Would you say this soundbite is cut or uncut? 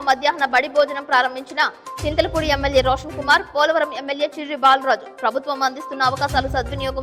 uncut